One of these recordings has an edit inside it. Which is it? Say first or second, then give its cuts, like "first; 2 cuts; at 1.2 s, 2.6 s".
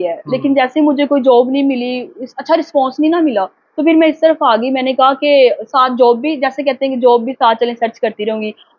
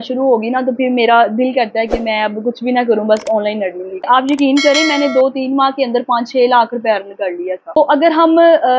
second; 2 cuts; at 4.1 s, 7.8 s